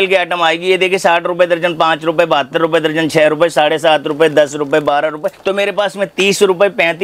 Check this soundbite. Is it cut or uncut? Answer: cut